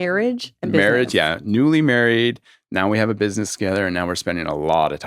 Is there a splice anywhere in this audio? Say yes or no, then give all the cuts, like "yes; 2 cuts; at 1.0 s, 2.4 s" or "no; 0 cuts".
no; 0 cuts